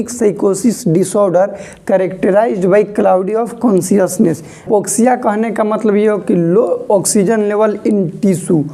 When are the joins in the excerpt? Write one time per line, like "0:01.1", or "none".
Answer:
0:04.6